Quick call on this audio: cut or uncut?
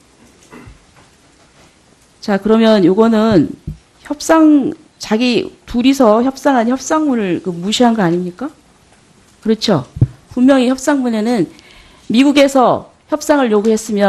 uncut